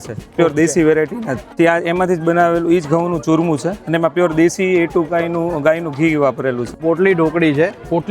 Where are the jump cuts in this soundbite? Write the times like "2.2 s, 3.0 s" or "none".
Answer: 1.5 s, 6.8 s